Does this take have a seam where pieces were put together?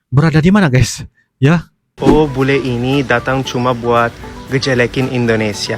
yes; 1 cut; at 1.9 s

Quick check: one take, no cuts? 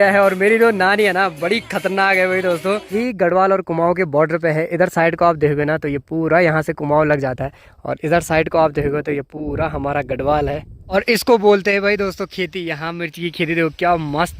no; 2 cuts; at 2.9 s, 10.7 s

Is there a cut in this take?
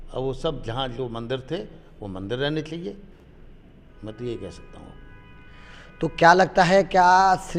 no; 0 cuts

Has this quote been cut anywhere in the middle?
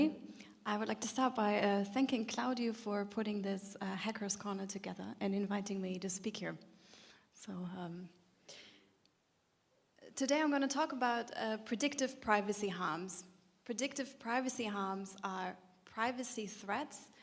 yes; 1 cut; at 13.9 s

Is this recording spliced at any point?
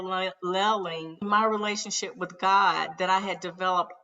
yes; 1 cut; at 1.2 s

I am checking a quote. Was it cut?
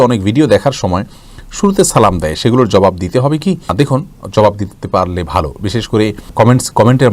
no; 0 cuts

